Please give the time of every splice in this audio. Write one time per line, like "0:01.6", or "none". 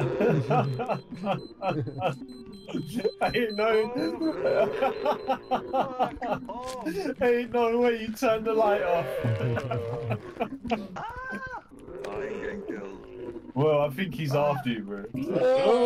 none